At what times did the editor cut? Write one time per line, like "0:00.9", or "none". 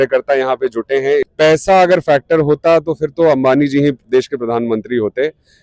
0:01.3